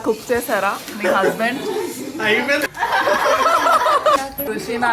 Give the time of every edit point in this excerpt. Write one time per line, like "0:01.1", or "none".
0:02.6
0:04.2